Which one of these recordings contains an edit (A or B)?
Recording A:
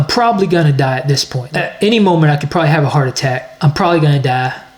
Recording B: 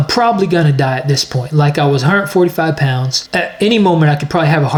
A